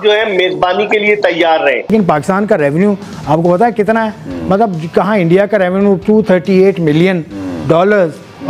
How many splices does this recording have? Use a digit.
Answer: 1